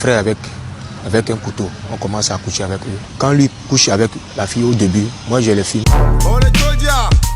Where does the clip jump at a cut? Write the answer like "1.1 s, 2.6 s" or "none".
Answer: 5.8 s